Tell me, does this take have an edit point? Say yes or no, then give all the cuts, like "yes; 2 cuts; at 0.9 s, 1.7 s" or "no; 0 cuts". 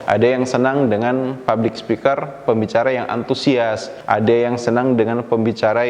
yes; 1 cut; at 3.9 s